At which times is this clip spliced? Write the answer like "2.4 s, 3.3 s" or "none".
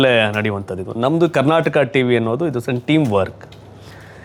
none